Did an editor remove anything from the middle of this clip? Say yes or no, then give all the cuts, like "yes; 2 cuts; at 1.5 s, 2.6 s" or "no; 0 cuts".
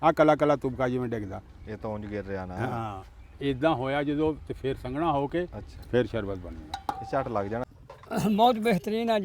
yes; 1 cut; at 7.6 s